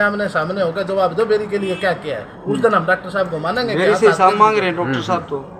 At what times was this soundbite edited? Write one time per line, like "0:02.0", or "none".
none